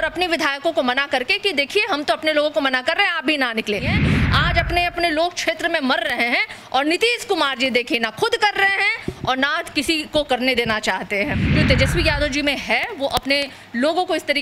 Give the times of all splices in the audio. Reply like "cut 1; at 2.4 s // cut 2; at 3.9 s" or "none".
cut 1; at 3.9 s // cut 2; at 11.4 s